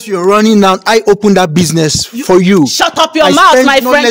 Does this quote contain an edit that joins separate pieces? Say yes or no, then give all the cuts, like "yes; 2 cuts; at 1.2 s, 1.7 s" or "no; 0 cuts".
no; 0 cuts